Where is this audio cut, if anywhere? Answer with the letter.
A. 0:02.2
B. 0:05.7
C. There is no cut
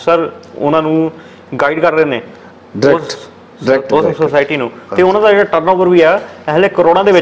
C